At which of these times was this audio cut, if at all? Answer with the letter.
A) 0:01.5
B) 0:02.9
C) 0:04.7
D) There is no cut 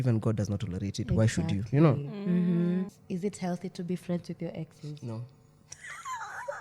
B